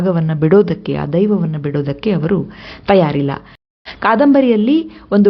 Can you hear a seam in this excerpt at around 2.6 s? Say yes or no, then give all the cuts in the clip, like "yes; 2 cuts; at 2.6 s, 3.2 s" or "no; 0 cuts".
no; 1 cut; at 3.8 s